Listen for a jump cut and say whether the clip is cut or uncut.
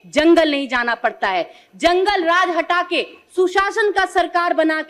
uncut